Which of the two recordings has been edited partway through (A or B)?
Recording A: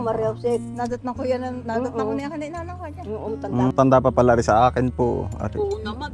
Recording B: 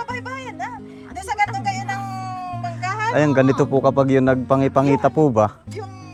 A